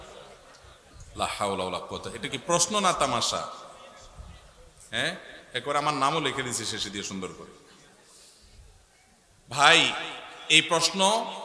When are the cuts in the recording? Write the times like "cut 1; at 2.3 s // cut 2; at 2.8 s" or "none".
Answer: none

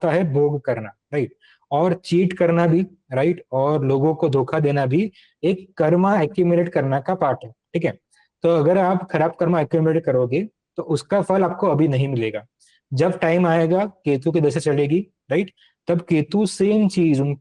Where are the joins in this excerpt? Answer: none

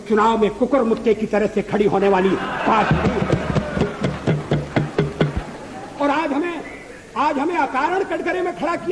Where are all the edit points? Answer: none

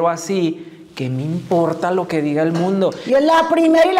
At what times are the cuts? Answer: cut 1; at 3.0 s

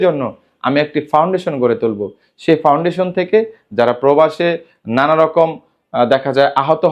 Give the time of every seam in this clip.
none

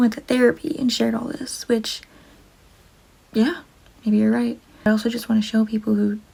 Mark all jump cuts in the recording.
none

